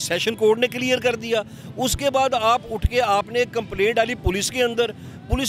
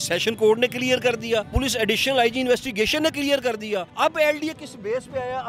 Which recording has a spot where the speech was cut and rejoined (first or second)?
second